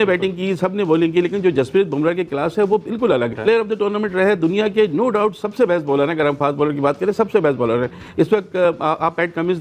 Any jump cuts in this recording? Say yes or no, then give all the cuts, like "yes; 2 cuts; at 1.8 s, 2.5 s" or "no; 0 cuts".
yes; 1 cut; at 3.3 s